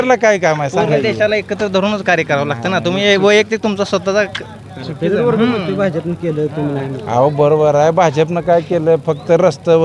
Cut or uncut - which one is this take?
uncut